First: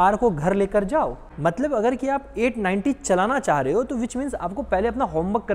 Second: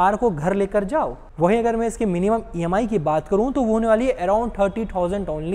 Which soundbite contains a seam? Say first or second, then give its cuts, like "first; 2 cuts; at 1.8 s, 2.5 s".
first; 1 cut; at 1.3 s